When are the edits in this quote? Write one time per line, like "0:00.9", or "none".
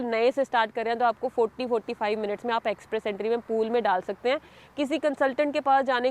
none